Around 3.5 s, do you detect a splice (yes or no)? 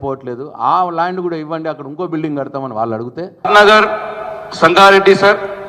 yes